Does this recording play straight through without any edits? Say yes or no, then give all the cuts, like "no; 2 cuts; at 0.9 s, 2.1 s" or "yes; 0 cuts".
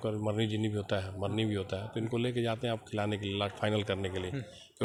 yes; 0 cuts